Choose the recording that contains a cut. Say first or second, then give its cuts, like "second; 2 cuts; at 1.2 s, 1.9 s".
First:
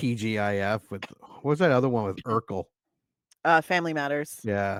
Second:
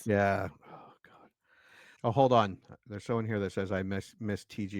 second; 1 cut; at 1.9 s